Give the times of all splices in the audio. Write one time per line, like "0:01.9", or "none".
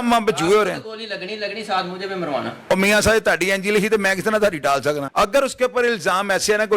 0:05.1